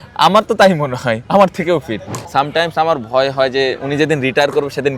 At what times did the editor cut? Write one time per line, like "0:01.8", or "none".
0:02.1